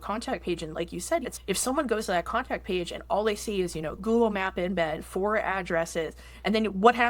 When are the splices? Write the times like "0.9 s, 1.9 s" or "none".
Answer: 1.2 s, 4.0 s